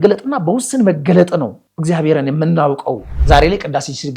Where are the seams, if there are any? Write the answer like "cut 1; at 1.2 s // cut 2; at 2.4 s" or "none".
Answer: cut 1; at 3.1 s